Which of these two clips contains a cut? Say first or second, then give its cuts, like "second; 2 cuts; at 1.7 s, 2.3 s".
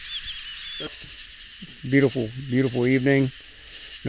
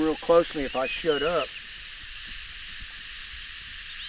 first; 1 cut; at 0.9 s